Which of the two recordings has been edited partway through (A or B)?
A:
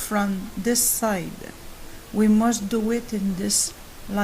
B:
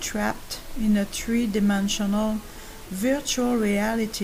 A